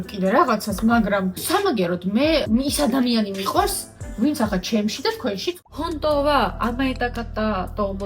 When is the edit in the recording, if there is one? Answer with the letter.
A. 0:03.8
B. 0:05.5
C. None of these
B